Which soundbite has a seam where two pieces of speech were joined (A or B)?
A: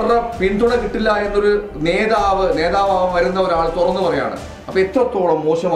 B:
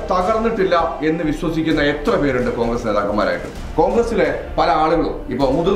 B